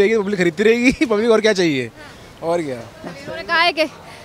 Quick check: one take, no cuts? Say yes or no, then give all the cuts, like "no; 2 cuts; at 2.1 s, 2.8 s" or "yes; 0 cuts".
yes; 0 cuts